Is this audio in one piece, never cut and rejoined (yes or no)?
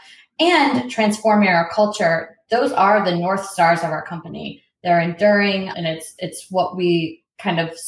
no